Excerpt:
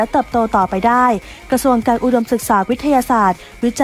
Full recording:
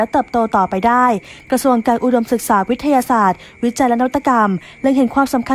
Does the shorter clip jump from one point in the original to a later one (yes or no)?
no